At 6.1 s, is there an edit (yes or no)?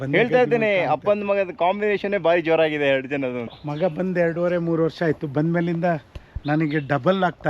no